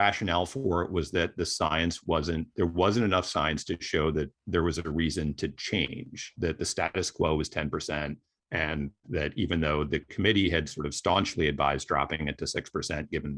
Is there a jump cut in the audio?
no; 0 cuts

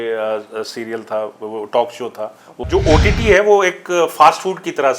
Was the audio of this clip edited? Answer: yes; 1 cut; at 2.6 s

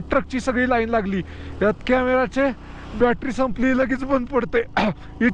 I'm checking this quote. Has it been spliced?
no; 0 cuts

